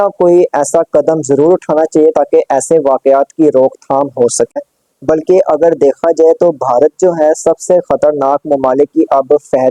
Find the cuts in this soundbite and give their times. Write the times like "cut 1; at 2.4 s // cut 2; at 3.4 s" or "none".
cut 1; at 4.5 s